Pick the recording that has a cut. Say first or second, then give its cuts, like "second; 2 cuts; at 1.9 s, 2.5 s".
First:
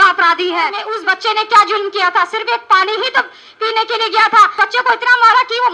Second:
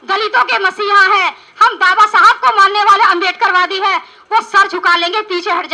first; 2 cuts; at 0.9 s, 4.5 s